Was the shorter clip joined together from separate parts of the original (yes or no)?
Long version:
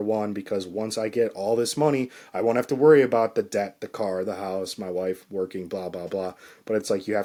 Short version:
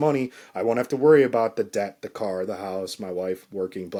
no